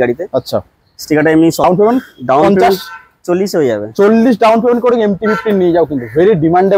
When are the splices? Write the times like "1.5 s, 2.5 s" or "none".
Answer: 1.6 s